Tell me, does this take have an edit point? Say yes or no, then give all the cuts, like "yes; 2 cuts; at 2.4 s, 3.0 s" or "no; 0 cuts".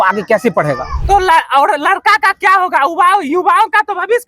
yes; 1 cut; at 0.9 s